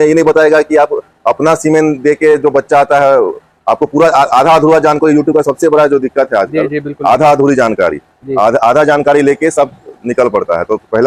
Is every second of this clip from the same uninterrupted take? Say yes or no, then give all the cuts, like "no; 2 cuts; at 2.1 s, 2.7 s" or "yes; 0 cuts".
yes; 0 cuts